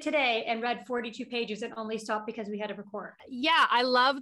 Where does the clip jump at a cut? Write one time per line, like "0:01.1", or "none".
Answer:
0:03.2